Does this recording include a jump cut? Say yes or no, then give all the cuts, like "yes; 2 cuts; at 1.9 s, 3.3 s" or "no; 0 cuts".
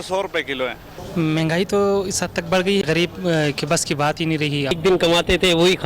yes; 3 cuts; at 0.9 s, 2.8 s, 4.8 s